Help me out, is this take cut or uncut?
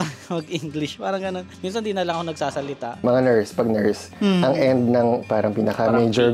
cut